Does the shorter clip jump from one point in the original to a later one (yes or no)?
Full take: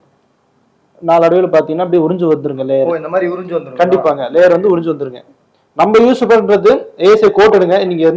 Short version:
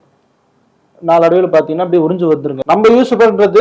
yes